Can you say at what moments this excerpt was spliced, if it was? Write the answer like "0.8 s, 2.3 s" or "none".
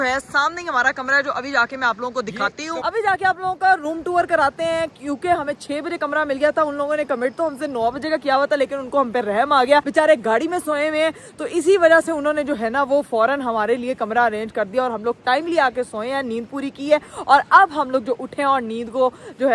none